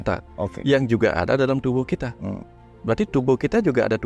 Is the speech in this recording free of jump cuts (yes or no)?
yes